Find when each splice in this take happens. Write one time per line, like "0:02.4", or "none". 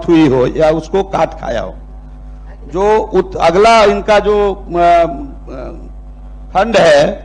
none